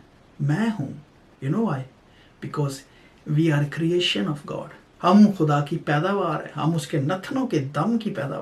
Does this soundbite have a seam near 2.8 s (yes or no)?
no